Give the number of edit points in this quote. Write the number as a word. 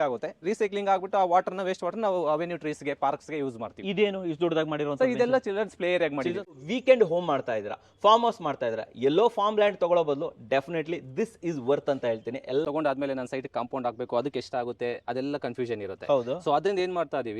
two